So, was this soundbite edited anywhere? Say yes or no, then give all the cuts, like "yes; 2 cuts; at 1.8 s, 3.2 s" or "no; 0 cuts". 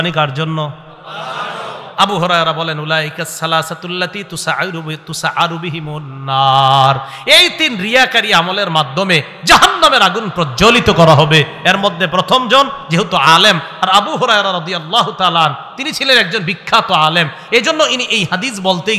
no; 0 cuts